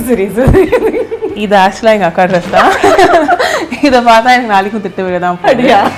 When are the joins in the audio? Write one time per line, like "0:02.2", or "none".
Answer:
none